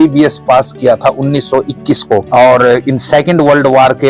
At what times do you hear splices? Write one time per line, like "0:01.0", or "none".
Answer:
0:02.3